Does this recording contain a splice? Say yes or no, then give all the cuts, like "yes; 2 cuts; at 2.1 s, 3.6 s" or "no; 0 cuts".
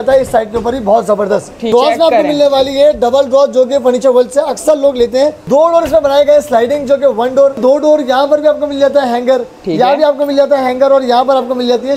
yes; 3 cuts; at 1.7 s, 5.4 s, 7.6 s